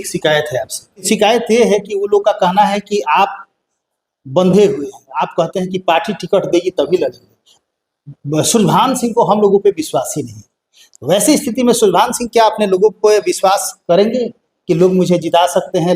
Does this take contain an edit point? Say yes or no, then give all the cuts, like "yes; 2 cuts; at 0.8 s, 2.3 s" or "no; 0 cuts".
yes; 1 cut; at 1.0 s